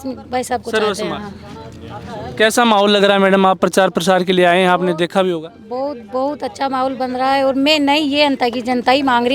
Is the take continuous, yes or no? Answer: yes